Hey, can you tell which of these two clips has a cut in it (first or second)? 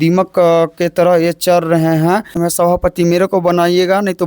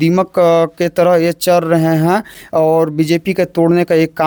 first